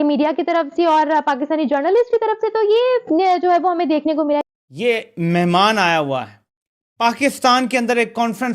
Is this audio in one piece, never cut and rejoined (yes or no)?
no